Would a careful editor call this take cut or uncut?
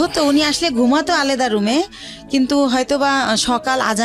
uncut